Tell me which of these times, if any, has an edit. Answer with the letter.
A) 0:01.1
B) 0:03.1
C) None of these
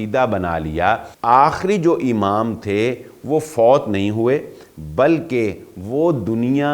A